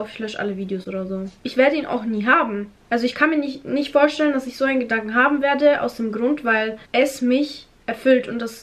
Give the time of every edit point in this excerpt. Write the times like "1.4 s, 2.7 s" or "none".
none